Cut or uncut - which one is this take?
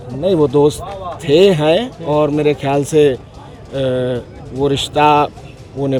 uncut